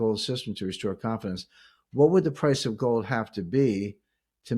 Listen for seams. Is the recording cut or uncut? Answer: uncut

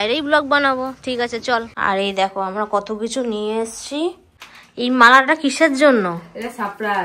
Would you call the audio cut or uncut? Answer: cut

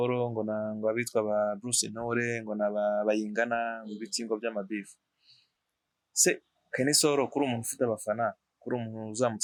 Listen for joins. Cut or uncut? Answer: uncut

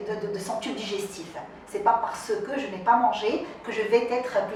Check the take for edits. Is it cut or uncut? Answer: uncut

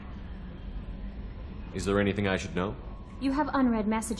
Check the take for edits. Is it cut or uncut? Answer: cut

